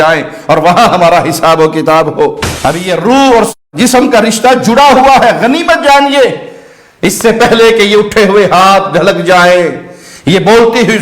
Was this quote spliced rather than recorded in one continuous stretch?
yes; 1 cut; at 2.4 s

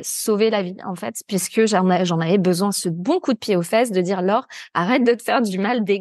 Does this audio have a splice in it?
no; 0 cuts

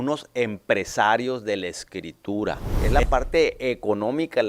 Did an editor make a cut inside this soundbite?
yes; 1 cut; at 2.8 s

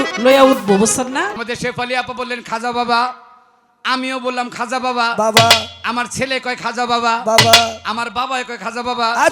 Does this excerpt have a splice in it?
yes; 1 cut; at 1.4 s

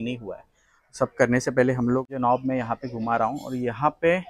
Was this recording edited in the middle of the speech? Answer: yes; 1 cut; at 2.1 s

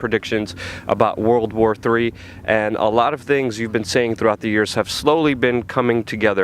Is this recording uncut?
no; 1 cut; at 5.1 s

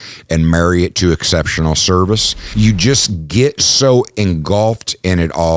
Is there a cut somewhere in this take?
yes; 1 cut; at 2.4 s

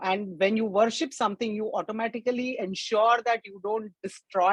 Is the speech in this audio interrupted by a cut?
no; 0 cuts

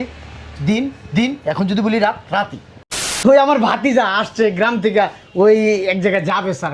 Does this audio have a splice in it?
yes; 1 cut; at 3.1 s

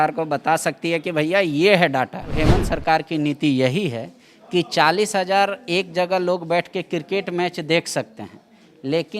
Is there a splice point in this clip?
yes; 1 cut; at 2.3 s

